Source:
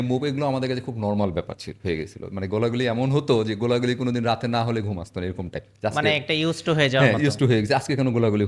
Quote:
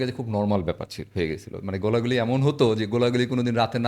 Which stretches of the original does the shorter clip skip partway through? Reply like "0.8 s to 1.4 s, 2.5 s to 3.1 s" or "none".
none